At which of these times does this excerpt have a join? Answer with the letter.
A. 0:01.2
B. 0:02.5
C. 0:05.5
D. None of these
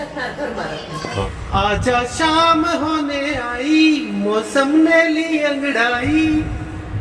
A